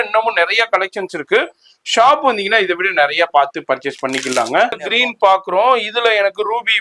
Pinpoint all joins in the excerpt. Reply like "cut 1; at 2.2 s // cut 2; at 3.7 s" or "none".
cut 1; at 4.8 s